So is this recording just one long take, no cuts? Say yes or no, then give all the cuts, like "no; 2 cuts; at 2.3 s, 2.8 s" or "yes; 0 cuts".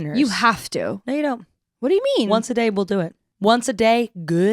no; 1 cut; at 3.2 s